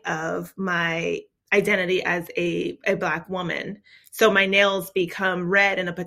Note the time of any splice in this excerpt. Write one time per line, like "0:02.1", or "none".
0:01.4